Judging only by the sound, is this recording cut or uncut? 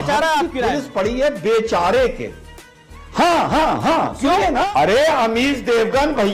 cut